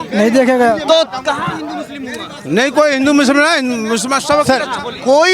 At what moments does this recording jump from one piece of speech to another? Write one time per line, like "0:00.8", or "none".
none

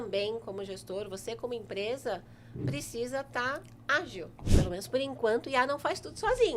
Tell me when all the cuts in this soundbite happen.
0:04.4

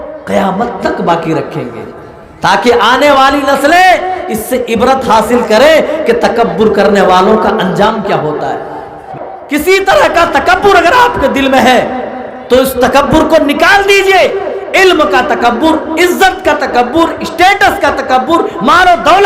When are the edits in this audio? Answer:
0:09.0

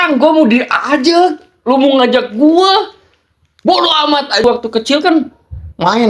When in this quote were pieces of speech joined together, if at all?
0:04.4

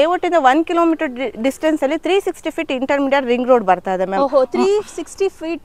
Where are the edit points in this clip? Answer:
none

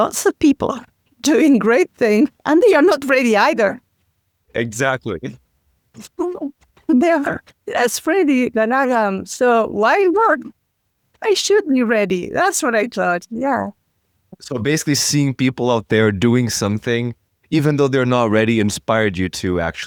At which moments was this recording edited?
none

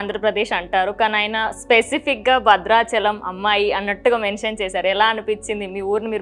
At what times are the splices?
none

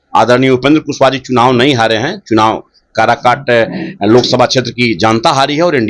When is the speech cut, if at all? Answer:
none

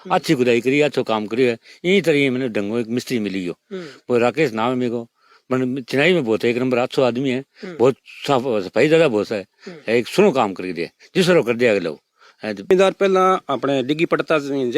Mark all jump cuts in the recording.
0:12.7

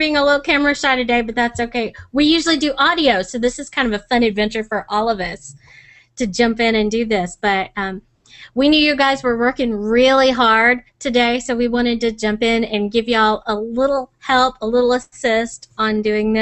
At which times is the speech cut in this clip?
none

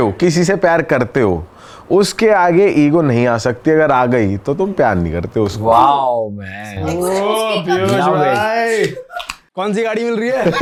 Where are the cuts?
none

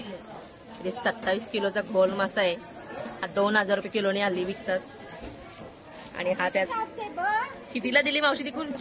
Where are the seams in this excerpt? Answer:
0:06.7

